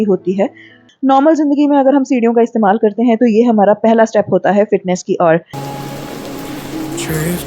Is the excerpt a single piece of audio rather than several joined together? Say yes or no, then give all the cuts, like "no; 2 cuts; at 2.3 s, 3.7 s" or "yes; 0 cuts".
no; 2 cuts; at 0.9 s, 5.5 s